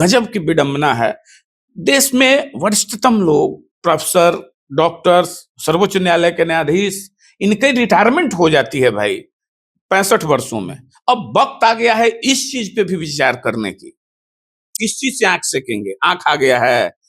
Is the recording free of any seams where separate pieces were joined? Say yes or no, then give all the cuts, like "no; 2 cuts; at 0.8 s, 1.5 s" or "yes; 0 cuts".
no; 1 cut; at 14.7 s